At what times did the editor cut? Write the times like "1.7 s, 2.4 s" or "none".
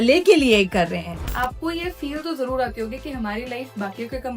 1.1 s